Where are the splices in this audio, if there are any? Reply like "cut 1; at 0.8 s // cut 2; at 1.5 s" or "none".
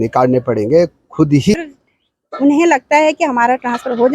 cut 1; at 1.5 s